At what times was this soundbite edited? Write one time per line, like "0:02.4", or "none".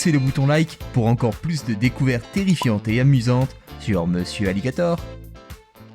0:05.0